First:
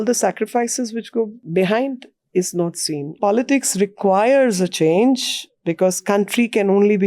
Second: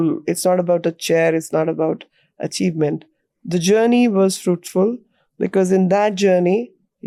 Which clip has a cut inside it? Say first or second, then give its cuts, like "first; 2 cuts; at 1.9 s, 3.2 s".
first; 2 cuts; at 1.4 s, 3.1 s